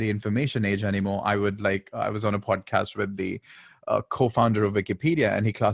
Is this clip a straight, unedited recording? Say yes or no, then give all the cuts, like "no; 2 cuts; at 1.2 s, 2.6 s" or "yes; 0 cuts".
yes; 0 cuts